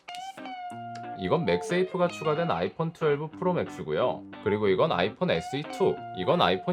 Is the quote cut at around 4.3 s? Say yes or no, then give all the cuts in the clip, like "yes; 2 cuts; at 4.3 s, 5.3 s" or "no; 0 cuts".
yes; 1 cut; at 4.3 s